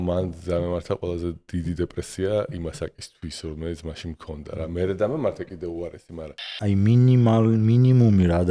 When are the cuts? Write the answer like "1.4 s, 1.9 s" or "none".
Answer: 6.6 s